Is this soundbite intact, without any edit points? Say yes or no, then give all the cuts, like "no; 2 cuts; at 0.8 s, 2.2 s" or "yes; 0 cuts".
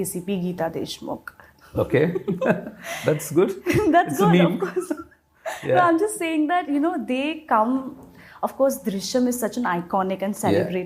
yes; 0 cuts